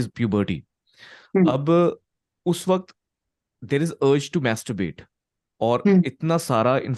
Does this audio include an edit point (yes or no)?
no